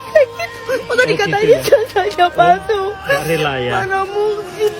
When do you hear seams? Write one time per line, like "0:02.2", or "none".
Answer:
none